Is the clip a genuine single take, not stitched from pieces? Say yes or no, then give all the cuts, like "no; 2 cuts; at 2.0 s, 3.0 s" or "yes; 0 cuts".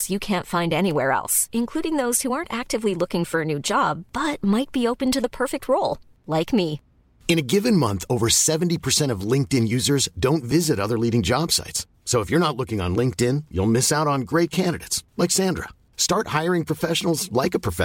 yes; 0 cuts